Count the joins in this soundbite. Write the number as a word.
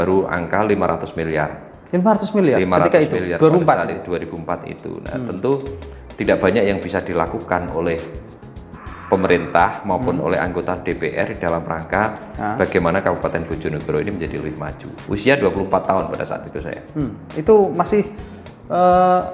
zero